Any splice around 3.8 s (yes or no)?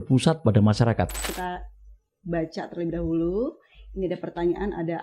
no